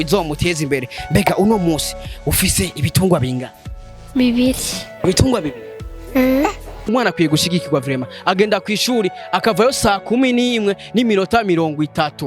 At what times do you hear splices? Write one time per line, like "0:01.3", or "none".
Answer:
0:06.9

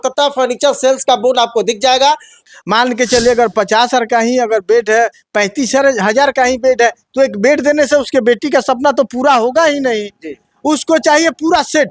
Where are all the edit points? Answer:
0:02.3

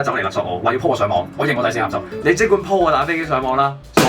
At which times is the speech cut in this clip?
0:02.1

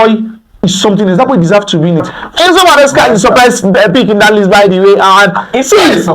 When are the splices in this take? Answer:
0:02.2

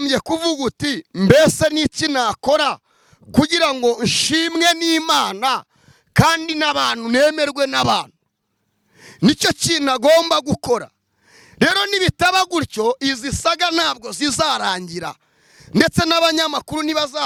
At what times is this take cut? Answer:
none

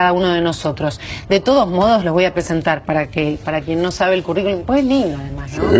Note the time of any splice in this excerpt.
0:04.0

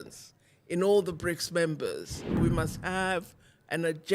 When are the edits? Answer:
0:02.4

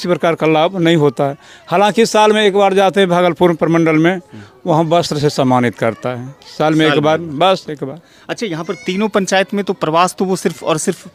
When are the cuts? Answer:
none

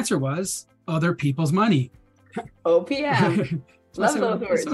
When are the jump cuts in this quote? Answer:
none

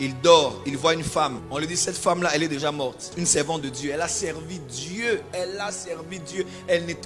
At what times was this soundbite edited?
0:01.4
0:03.1

